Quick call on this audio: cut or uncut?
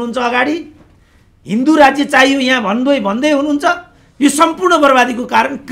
uncut